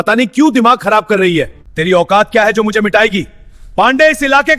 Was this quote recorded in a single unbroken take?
no; 1 cut; at 1.6 s

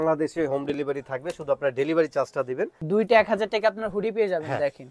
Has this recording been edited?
yes; 1 cut; at 2.8 s

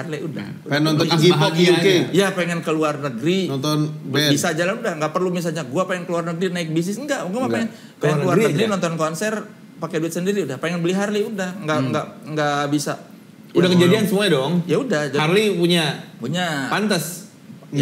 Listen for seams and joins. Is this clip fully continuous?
yes; 0 cuts

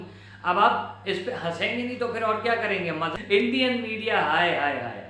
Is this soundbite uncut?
no; 1 cut; at 3.1 s

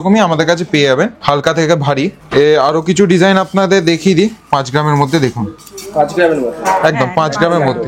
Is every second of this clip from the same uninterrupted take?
yes; 0 cuts

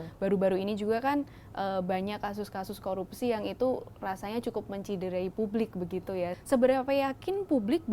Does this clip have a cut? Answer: yes; 1 cut; at 6.4 s

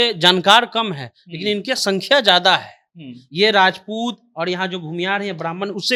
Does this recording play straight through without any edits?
yes; 0 cuts

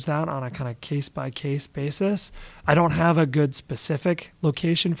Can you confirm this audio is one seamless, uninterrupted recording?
no; 1 cut; at 2.6 s

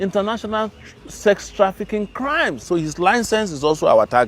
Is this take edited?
yes; 1 cut; at 2.6 s

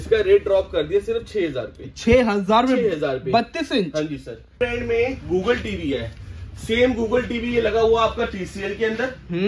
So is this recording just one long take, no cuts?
no; 1 cut; at 4.5 s

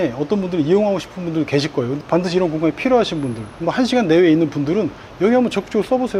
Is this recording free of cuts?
no; 1 cut; at 1.9 s

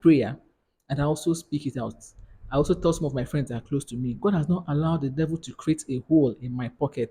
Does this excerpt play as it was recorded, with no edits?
yes; 0 cuts

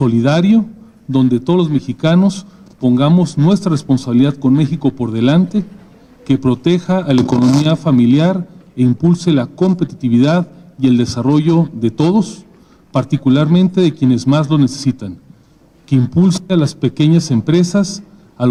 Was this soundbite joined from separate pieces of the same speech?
no; 0 cuts

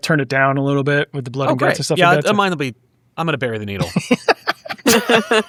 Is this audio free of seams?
yes; 0 cuts

